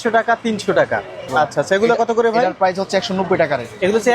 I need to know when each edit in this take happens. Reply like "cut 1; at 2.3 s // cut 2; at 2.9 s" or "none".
cut 1; at 1.3 s

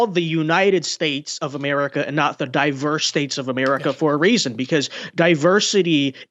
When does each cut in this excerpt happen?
none

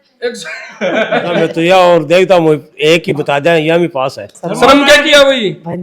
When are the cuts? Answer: cut 1; at 1.4 s // cut 2; at 4.4 s

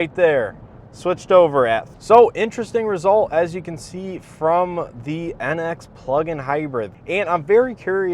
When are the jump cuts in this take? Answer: cut 1; at 1.9 s // cut 2; at 6.9 s

